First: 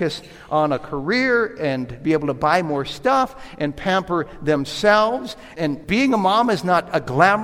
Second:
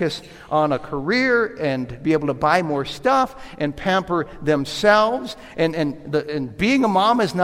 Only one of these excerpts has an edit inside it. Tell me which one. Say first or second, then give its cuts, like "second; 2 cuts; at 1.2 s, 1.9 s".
first; 1 cut; at 5.5 s